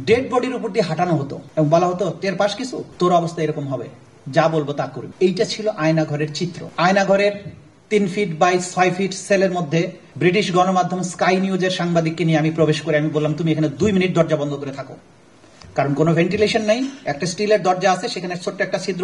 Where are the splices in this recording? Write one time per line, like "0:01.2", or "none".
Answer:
0:01.4
0:02.8
0:05.0
0:06.6
0:10.0